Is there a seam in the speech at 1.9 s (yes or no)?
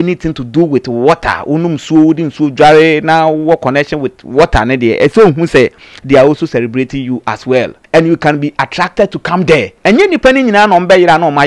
no